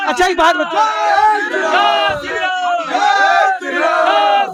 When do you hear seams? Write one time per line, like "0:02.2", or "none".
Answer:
none